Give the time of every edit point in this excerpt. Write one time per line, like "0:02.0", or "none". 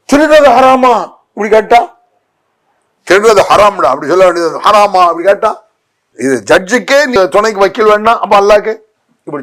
0:07.2